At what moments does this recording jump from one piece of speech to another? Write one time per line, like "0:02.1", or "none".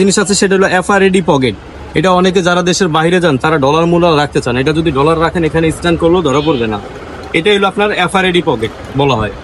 none